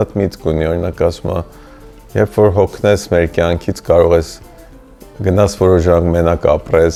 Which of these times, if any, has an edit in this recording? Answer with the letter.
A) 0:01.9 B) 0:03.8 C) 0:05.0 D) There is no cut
D